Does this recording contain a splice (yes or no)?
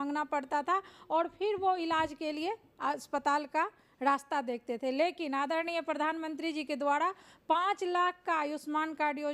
no